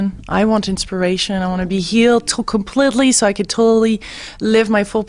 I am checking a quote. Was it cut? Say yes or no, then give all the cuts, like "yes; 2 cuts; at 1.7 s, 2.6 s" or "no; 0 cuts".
no; 0 cuts